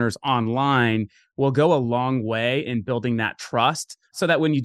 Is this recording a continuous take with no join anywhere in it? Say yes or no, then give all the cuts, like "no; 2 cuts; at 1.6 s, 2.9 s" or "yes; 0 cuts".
yes; 0 cuts